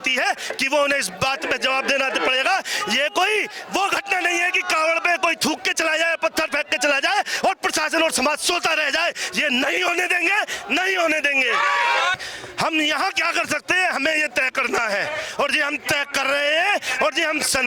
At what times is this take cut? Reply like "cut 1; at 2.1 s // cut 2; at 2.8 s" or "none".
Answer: cut 1; at 12.2 s